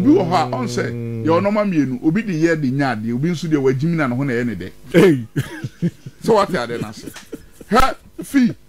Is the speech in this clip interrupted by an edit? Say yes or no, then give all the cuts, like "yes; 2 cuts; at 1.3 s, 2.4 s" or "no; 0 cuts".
no; 0 cuts